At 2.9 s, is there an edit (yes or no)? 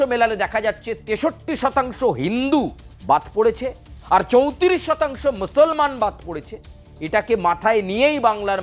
yes